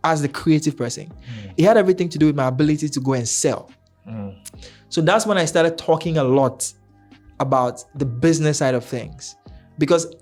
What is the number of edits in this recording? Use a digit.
0